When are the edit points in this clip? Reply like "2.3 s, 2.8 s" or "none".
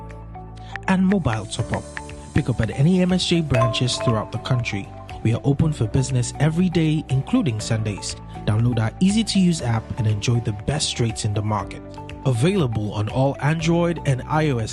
none